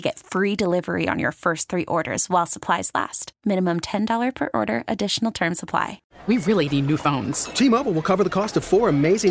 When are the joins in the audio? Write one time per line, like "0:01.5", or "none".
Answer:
0:06.1